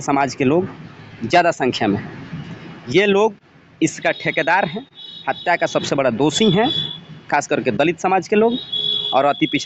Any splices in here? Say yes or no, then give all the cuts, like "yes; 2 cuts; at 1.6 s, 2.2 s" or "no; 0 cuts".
no; 0 cuts